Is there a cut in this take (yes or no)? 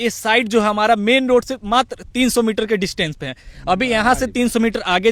no